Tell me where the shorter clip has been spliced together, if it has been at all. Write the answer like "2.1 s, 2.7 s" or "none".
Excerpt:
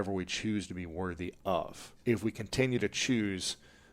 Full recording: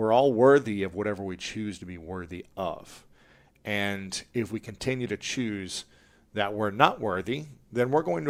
1.9 s